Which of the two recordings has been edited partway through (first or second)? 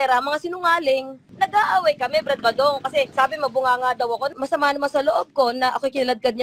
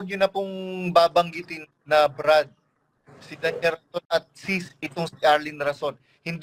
first